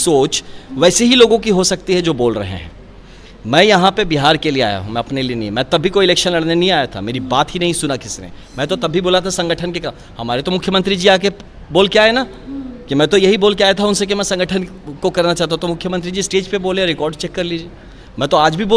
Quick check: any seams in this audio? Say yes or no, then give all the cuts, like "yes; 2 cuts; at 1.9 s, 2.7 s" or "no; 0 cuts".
no; 0 cuts